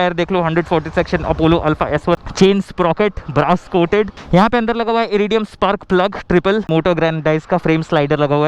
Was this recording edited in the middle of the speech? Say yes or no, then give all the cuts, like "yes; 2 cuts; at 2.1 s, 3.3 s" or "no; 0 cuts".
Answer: yes; 3 cuts; at 2.2 s, 4.2 s, 6.7 s